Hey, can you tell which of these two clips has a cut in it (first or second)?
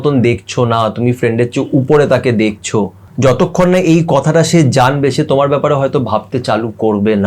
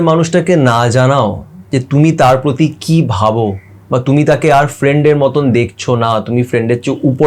first